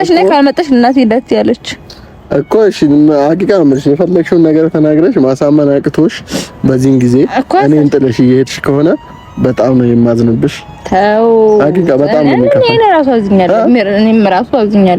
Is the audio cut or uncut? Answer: uncut